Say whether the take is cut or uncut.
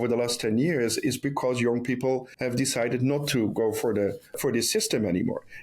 cut